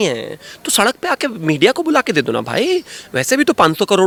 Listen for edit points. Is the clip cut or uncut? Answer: uncut